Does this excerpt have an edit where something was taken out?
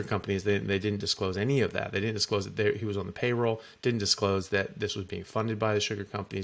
no; 0 cuts

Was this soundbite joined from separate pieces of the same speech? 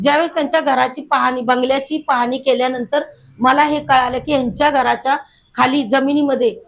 no; 0 cuts

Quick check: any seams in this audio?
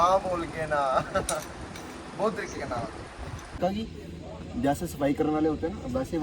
yes; 1 cut; at 3.6 s

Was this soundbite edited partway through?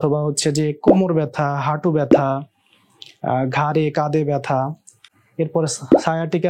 no; 0 cuts

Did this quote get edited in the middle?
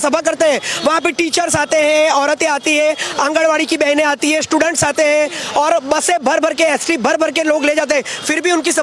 no; 0 cuts

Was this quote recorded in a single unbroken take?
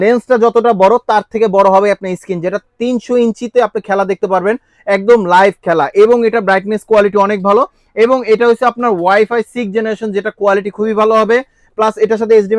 yes; 0 cuts

